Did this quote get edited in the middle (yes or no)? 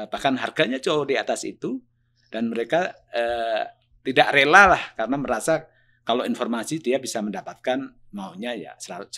no